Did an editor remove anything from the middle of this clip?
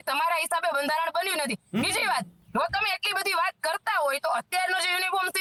no; 0 cuts

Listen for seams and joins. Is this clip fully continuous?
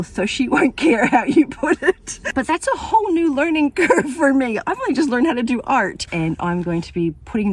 no; 2 cuts; at 2.1 s, 6.1 s

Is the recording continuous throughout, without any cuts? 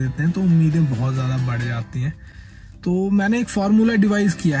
yes; 0 cuts

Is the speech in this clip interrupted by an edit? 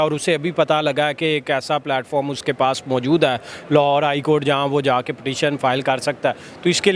no; 0 cuts

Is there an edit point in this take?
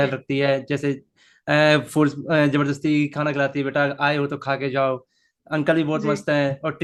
no; 0 cuts

